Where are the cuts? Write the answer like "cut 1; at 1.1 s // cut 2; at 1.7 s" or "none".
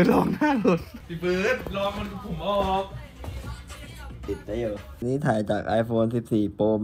cut 1; at 1.0 s // cut 2; at 5.0 s